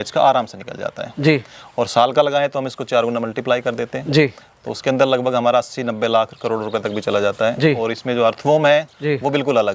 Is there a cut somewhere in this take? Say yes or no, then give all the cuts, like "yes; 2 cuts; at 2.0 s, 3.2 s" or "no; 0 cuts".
no; 0 cuts